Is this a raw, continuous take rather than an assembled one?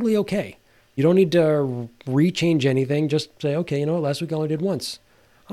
no; 1 cut; at 1.0 s

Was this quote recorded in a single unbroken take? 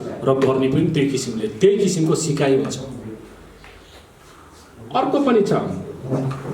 yes; 0 cuts

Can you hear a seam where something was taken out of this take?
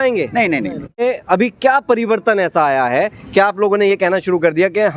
yes; 1 cut; at 1.0 s

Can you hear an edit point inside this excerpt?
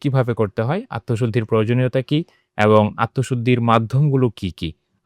no; 0 cuts

